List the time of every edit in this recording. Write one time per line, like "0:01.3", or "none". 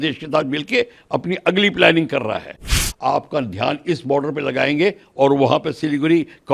0:02.8